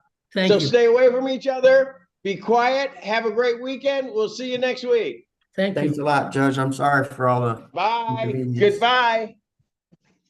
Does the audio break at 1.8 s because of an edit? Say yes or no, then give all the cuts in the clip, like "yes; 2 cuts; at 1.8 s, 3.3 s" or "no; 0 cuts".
no; 0 cuts